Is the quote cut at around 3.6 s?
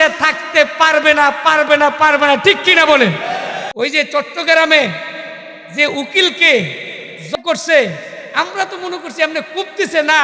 yes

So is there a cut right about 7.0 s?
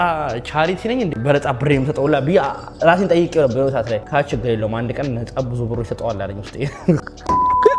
yes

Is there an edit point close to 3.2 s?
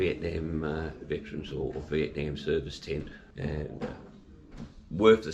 yes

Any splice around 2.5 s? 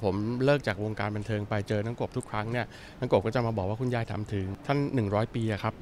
no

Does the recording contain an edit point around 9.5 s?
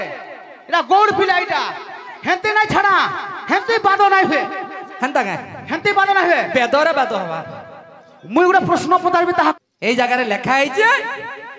yes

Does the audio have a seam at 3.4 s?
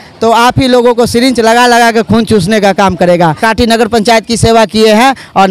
yes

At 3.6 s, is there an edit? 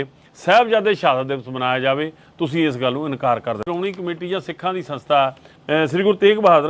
yes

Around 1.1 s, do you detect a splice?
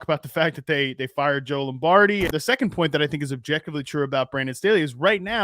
no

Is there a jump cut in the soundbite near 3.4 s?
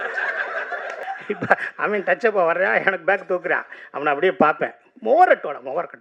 no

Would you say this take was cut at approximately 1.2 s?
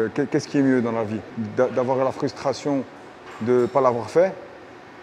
yes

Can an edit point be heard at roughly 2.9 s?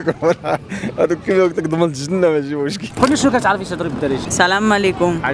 yes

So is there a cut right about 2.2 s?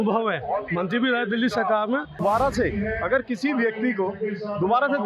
yes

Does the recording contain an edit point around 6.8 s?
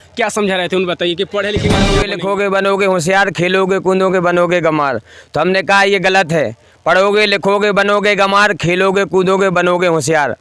no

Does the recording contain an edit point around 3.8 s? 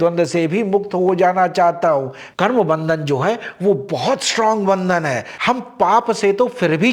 no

